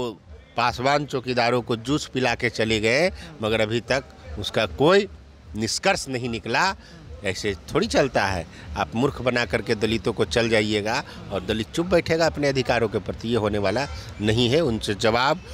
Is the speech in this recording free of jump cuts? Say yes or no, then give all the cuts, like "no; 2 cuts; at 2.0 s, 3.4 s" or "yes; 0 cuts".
yes; 0 cuts